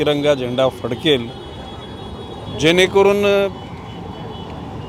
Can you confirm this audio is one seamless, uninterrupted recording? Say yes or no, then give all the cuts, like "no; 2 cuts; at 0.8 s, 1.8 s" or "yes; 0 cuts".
yes; 0 cuts